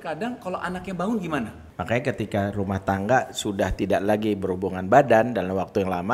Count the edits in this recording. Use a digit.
1